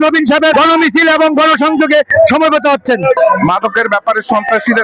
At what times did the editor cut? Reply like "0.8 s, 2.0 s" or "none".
3.2 s